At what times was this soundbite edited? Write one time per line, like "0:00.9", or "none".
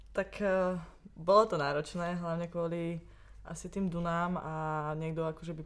none